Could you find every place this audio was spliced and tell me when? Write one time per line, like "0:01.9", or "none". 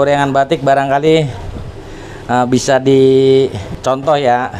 0:03.7